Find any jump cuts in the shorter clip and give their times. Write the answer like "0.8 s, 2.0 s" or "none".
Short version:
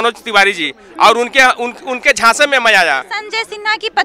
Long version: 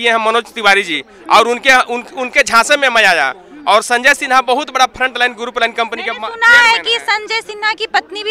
3.2 s